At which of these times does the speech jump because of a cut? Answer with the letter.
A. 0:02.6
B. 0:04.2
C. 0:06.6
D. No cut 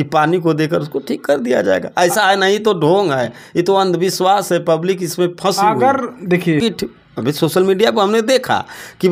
C